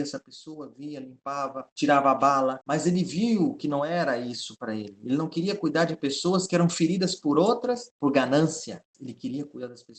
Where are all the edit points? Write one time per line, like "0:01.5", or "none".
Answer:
0:01.6
0:02.6
0:07.9
0:08.9